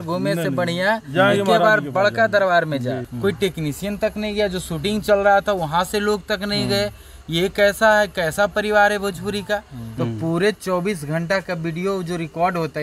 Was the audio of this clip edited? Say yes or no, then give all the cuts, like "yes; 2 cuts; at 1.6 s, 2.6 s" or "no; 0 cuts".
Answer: yes; 2 cuts; at 3.1 s, 9.8 s